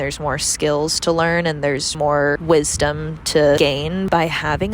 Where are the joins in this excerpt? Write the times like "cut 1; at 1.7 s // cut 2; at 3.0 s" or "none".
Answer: cut 1; at 1.9 s // cut 2; at 3.6 s